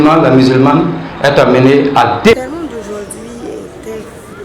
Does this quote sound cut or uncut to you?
cut